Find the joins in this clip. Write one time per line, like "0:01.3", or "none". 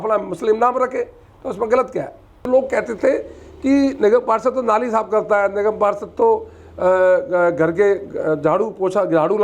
0:02.5

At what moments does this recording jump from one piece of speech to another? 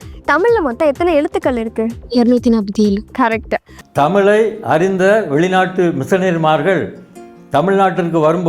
0:03.8

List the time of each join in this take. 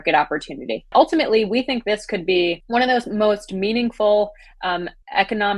0:00.9
0:02.6

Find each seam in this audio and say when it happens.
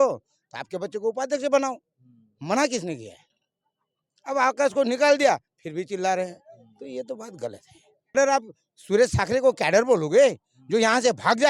0:08.1

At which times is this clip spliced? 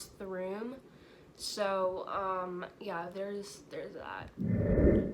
0:04.2

